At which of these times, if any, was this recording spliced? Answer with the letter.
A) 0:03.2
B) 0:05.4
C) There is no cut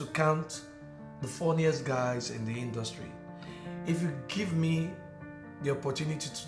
C